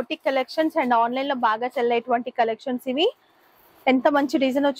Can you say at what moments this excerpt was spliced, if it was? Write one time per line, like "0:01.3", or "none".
none

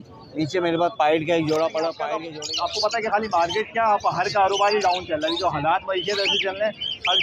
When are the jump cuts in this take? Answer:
0:02.1

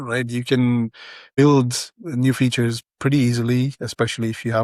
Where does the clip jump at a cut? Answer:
0:01.4

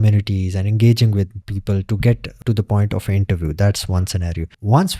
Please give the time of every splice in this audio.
0:01.4
0:02.4

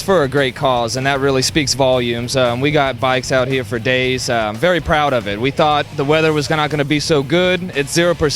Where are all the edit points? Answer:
none

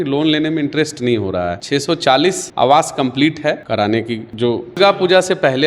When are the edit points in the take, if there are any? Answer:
0:01.6
0:03.6
0:04.8

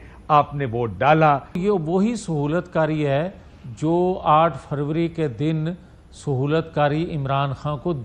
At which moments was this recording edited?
0:01.6

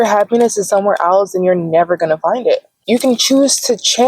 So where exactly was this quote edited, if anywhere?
0:02.7

